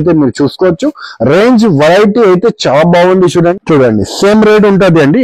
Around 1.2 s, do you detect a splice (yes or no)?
no